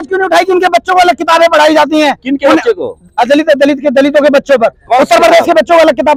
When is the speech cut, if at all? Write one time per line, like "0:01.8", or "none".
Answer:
none